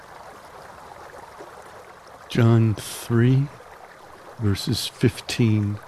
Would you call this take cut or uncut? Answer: cut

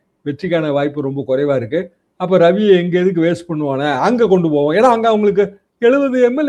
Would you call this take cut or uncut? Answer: uncut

